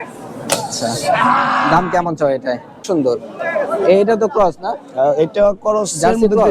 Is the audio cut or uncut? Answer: cut